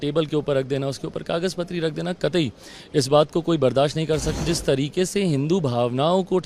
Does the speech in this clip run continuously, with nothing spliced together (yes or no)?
no